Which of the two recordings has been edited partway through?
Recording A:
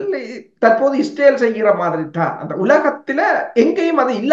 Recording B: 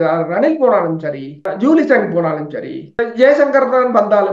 B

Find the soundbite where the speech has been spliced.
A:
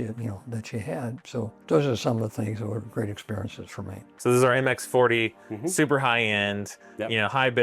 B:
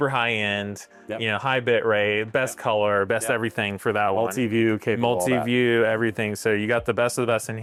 A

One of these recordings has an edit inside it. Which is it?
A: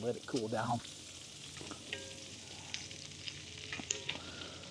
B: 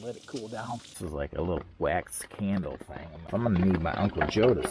B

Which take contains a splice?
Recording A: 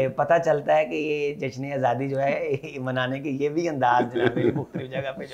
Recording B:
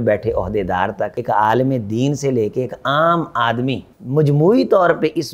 B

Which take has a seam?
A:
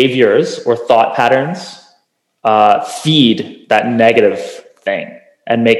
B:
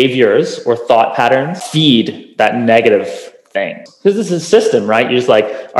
B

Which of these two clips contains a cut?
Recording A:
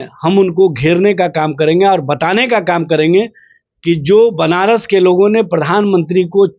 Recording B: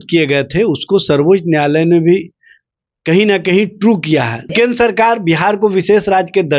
B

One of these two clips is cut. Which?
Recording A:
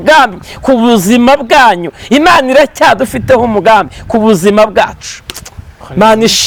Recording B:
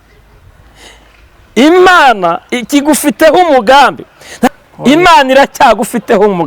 B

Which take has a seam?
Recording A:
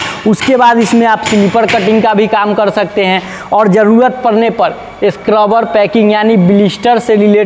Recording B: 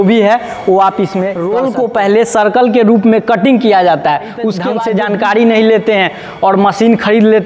B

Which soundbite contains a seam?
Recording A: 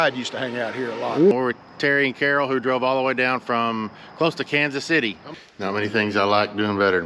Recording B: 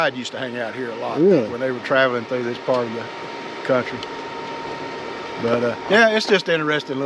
A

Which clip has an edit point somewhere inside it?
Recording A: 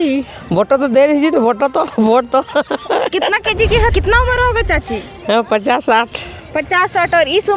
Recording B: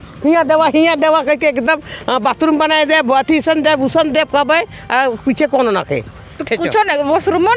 A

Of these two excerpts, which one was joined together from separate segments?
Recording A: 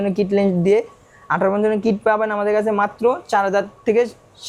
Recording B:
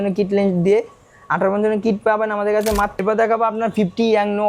B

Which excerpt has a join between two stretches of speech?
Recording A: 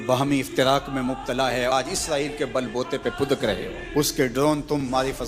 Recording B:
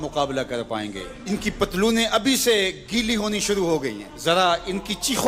A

